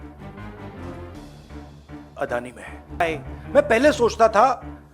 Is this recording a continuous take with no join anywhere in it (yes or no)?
no